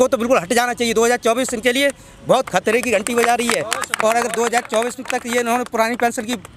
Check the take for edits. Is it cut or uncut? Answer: uncut